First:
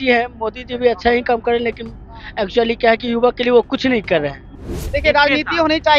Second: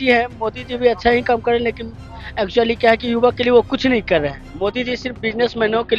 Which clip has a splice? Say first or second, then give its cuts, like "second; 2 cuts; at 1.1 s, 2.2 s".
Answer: first; 1 cut; at 4.5 s